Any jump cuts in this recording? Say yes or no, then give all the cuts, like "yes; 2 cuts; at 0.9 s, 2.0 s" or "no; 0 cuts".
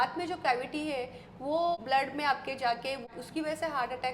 yes; 2 cuts; at 1.8 s, 3.1 s